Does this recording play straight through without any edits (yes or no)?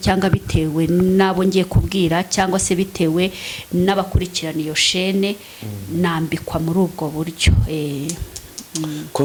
yes